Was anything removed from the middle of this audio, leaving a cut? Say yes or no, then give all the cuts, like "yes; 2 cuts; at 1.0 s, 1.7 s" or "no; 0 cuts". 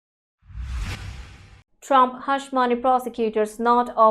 yes; 1 cut; at 1.1 s